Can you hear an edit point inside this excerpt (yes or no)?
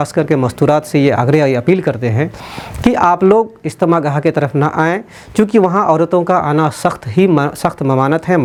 no